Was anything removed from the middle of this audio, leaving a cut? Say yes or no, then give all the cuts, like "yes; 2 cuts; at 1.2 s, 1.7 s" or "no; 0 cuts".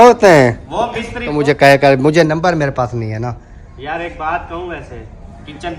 yes; 1 cut; at 1.3 s